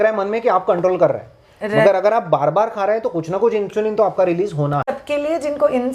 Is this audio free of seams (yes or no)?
no